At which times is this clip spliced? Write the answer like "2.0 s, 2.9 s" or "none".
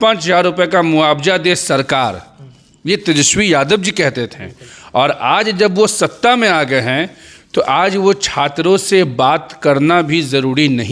none

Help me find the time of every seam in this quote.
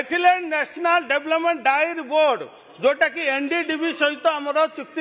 none

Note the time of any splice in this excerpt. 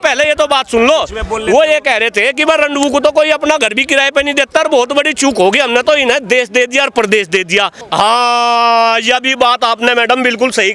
7.8 s

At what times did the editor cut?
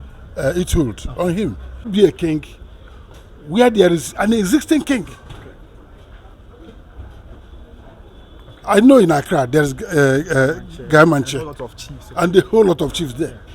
1.9 s

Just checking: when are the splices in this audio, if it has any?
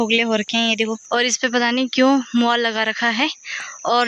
1.0 s

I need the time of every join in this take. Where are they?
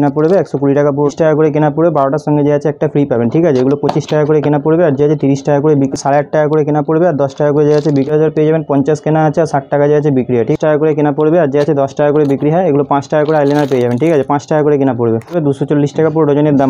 1.1 s, 5.9 s, 8.1 s, 10.5 s, 15.4 s

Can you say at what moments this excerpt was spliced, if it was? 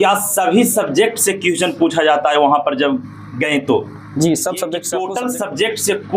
5.0 s

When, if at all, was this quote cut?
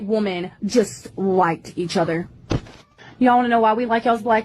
none

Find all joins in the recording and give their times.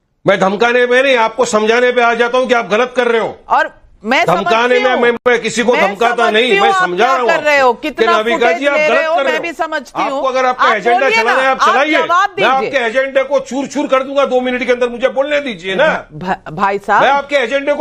none

